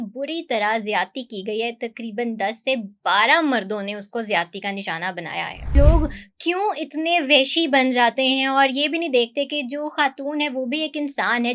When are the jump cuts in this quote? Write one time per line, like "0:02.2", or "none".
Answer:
0:05.7